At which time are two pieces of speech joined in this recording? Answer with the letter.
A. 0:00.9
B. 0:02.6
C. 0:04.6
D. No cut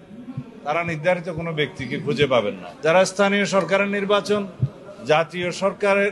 B